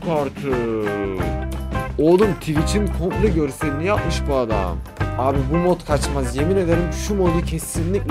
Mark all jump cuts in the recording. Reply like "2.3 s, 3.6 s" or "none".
none